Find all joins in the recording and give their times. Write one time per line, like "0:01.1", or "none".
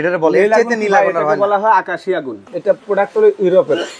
0:02.4